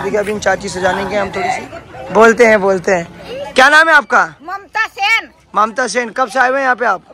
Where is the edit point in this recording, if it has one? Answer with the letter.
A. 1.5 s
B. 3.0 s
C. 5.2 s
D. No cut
A